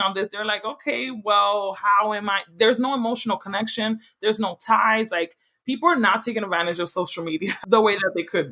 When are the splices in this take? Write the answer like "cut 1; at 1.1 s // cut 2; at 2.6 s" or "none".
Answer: cut 1; at 7.6 s

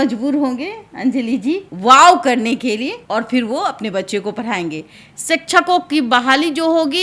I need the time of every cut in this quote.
cut 1; at 1.7 s // cut 2; at 3.0 s // cut 3; at 5.0 s

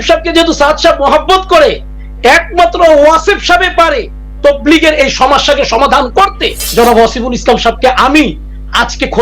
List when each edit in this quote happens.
cut 1; at 6.6 s

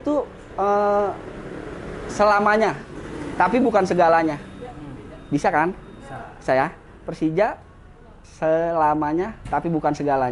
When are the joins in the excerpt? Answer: none

